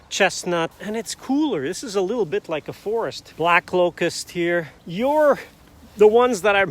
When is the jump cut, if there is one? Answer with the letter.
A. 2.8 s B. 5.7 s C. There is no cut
C